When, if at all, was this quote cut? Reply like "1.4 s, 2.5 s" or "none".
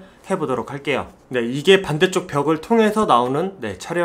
none